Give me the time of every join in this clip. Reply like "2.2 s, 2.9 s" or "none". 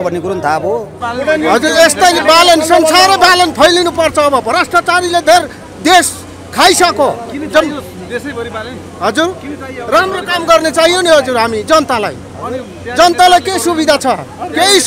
1.0 s